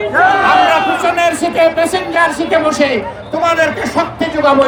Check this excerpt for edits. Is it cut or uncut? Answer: uncut